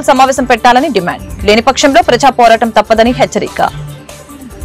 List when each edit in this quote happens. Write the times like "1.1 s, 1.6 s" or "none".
3.7 s